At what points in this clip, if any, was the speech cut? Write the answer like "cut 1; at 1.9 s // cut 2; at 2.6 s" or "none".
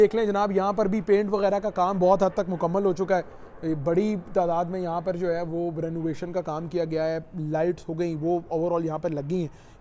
none